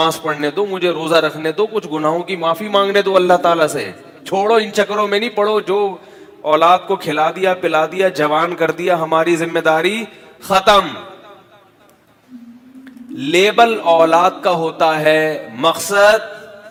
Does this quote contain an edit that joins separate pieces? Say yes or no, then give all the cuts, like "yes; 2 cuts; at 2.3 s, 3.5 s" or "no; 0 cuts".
no; 0 cuts